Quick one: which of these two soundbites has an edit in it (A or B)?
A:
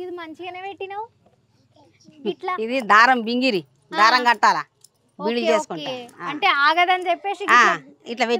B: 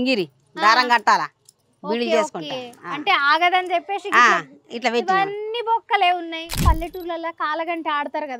B